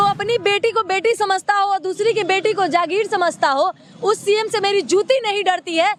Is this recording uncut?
yes; 0 cuts

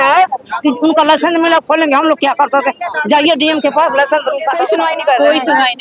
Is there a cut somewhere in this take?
yes; 1 cut; at 4.7 s

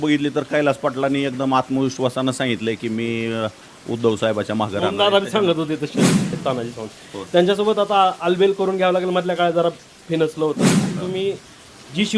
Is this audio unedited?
no; 2 cuts; at 6.3 s, 10.9 s

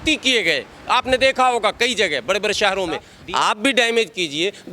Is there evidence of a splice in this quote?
yes; 1 cut; at 3.1 s

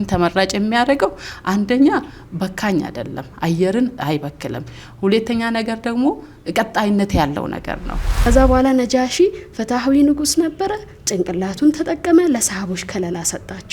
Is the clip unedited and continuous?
no; 2 cuts; at 4.0 s, 8.1 s

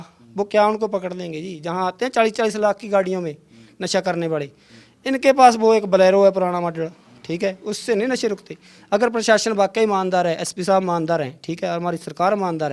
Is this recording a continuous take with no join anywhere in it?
yes; 0 cuts

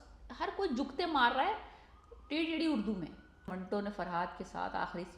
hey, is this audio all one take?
no; 1 cut; at 3.5 s

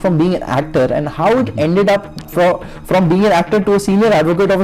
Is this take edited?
no; 0 cuts

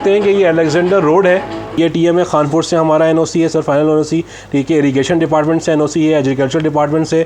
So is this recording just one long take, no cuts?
no; 1 cut; at 1.7 s

